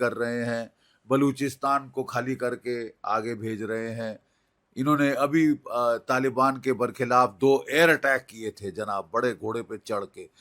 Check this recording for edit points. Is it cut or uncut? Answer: uncut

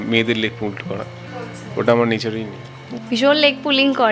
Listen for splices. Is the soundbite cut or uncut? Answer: cut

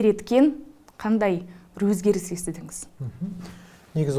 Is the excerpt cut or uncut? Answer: uncut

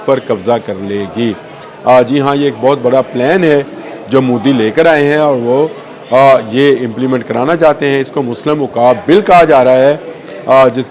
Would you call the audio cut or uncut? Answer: uncut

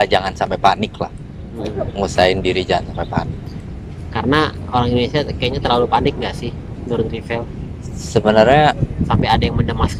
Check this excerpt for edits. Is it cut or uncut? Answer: uncut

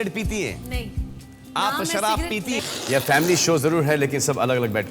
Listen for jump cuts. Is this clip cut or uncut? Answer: cut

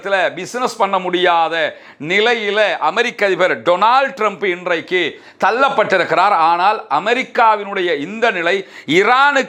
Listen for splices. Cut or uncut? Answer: uncut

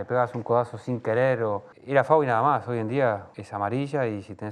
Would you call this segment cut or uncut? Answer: cut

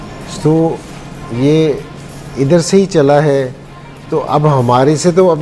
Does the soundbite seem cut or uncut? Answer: uncut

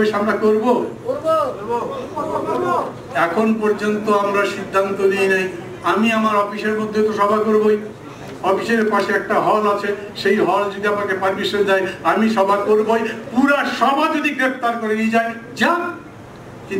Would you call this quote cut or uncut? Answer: uncut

